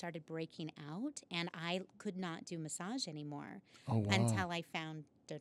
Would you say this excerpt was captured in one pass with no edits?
yes; 0 cuts

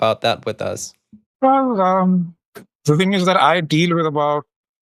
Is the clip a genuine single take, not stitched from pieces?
yes; 0 cuts

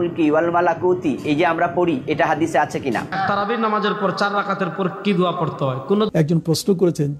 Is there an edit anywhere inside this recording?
yes; 2 cuts; at 3.1 s, 6.1 s

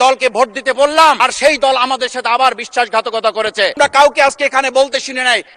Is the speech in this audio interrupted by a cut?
yes; 2 cuts; at 1.2 s, 3.8 s

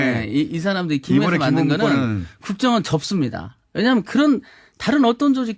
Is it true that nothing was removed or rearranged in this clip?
yes; 0 cuts

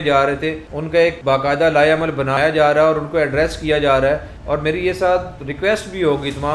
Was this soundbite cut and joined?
yes; 3 cuts; at 0.9 s, 2.3 s, 4.3 s

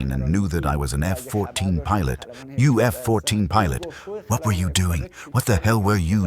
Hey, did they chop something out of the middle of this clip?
yes; 1 cut; at 2.4 s

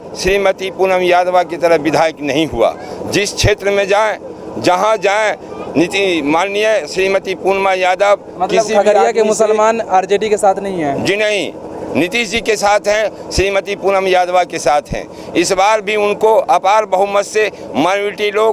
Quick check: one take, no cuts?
yes; 0 cuts

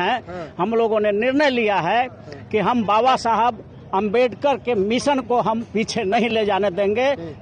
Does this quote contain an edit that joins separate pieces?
no; 0 cuts

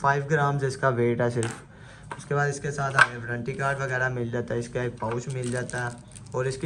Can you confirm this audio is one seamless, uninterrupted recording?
yes; 0 cuts

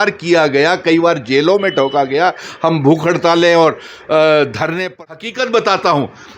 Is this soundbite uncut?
no; 1 cut; at 5.0 s

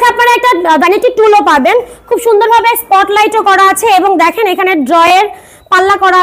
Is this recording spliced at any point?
no; 0 cuts

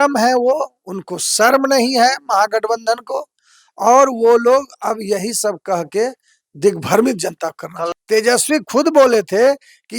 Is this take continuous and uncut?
no; 1 cut; at 7.9 s

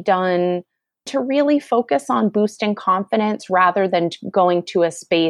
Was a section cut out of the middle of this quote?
yes; 1 cut; at 1.1 s

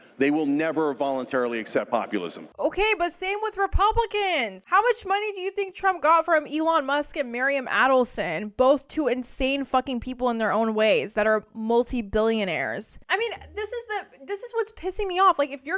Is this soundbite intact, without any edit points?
no; 1 cut; at 2.4 s

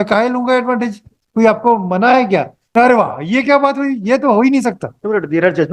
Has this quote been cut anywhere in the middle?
yes; 1 cut; at 2.7 s

